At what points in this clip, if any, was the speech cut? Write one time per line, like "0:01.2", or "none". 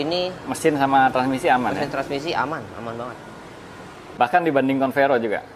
0:04.0